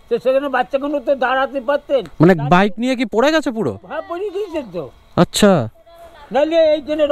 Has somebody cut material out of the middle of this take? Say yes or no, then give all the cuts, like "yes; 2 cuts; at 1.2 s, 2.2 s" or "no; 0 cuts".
no; 0 cuts